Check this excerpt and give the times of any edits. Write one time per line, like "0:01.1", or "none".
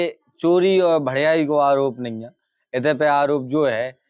none

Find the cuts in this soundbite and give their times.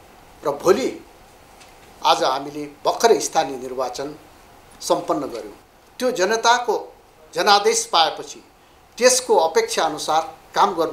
0:05.6

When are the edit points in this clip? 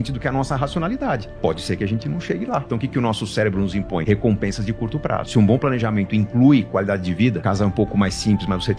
0:02.7
0:04.0
0:05.2
0:07.4

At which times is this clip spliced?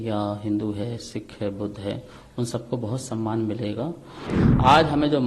0:04.3

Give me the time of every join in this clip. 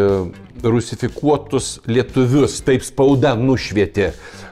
none

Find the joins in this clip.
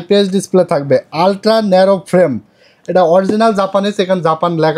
none

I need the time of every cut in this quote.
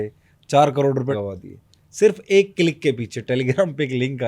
0:01.2

